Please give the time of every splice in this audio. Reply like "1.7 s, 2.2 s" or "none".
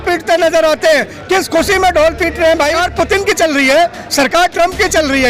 2.8 s